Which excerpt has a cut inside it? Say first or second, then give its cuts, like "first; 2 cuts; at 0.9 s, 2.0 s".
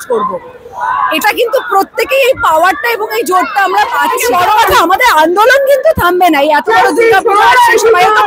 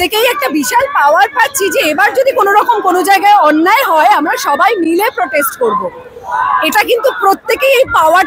first; 1 cut; at 4.2 s